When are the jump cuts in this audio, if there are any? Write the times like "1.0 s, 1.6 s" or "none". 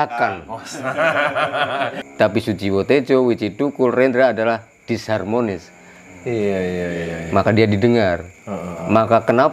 2.0 s